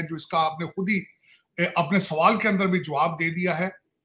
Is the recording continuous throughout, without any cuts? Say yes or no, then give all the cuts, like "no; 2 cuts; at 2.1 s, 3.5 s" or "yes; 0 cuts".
yes; 0 cuts